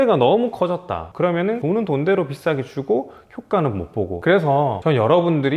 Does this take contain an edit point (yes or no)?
yes